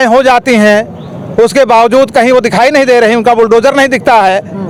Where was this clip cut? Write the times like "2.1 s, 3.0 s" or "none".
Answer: none